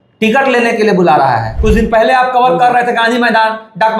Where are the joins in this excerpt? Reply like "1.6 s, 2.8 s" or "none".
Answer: 1.6 s